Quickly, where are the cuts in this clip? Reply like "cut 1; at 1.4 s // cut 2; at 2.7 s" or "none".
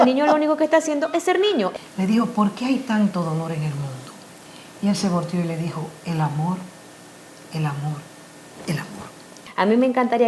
cut 1; at 1.7 s // cut 2; at 9.4 s